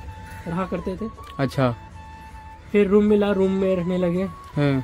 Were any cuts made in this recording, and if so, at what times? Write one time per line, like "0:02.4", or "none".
none